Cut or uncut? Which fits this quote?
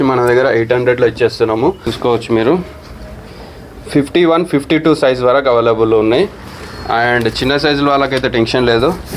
cut